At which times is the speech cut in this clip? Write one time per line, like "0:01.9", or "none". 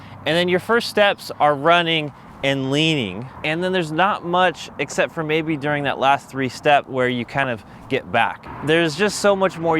0:03.3
0:08.5